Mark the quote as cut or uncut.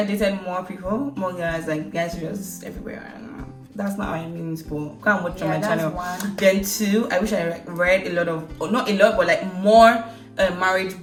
uncut